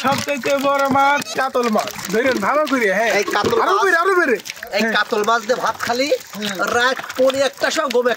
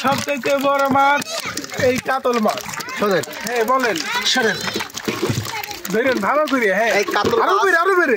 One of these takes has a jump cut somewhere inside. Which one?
first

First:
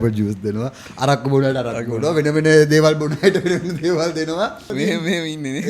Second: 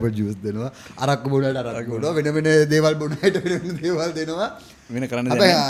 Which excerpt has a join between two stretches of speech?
first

